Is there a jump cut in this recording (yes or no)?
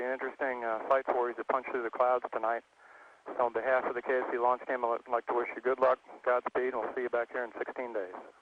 yes